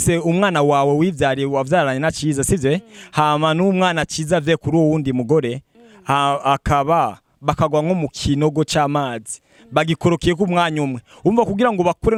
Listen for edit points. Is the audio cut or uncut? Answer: uncut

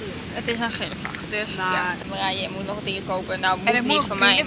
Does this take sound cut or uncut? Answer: cut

